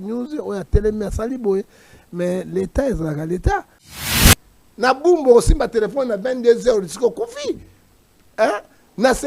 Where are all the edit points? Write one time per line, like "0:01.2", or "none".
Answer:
0:04.1

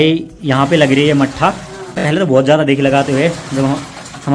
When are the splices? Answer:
0:02.0

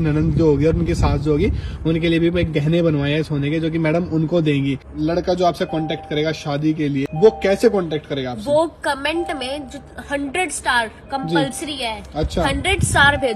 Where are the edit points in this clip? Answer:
0:04.9
0:07.1

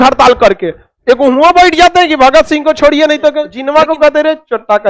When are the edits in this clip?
0:03.5

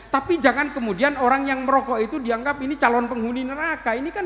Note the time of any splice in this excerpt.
none

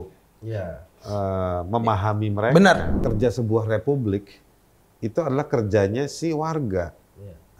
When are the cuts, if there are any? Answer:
0:02.9

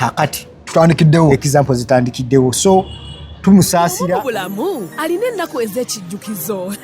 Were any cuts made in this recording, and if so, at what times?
0:04.0

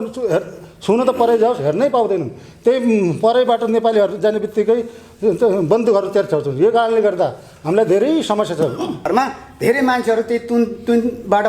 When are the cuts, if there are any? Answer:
0:09.1

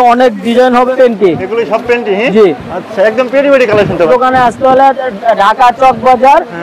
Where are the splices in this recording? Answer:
0:00.9
0:04.1

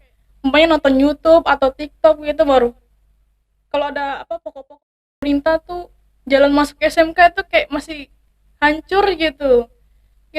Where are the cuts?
0:05.2

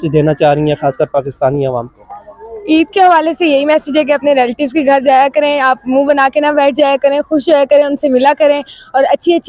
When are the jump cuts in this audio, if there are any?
none

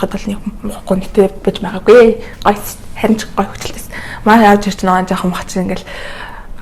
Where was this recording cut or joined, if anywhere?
none

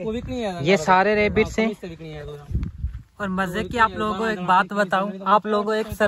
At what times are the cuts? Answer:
none

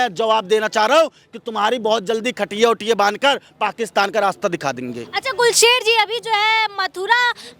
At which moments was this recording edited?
none

